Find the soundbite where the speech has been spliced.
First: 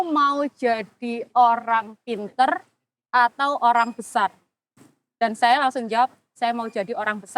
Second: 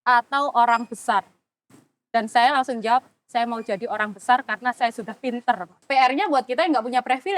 second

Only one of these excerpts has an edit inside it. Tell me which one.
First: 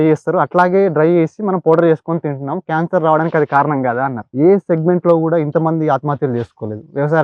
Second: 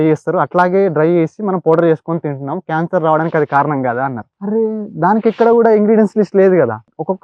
first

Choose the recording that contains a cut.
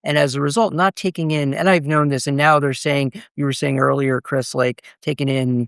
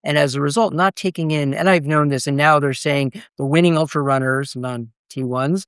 second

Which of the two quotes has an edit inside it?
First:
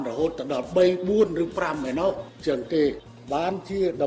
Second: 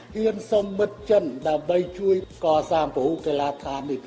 first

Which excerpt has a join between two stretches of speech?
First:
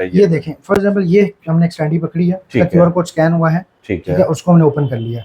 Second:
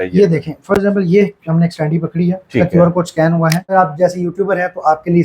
second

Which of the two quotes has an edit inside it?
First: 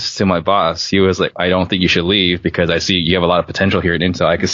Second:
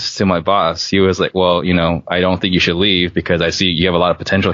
first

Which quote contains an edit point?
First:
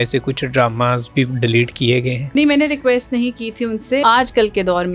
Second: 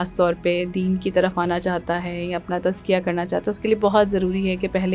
first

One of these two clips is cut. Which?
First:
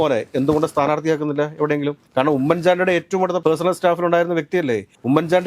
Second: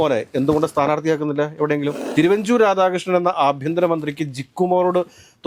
second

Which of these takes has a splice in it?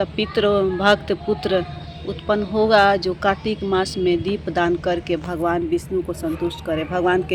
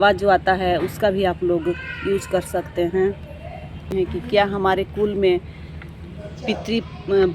second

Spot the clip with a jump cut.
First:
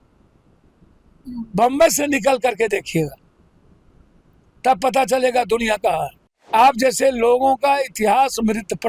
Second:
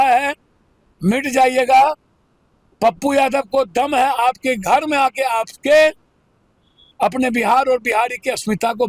first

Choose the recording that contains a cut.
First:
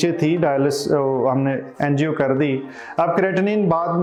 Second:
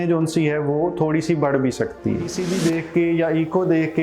second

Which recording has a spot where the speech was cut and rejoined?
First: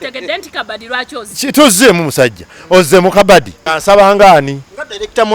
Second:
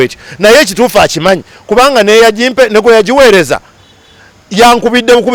first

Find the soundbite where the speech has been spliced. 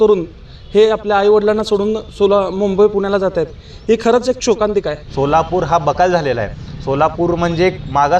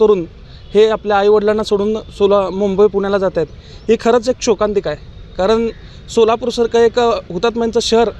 first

